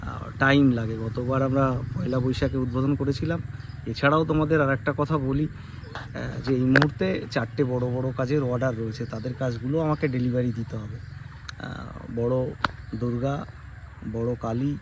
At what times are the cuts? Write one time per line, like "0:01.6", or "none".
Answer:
none